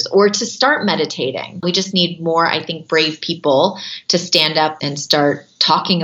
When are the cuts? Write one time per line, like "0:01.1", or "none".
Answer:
0:01.6
0:04.8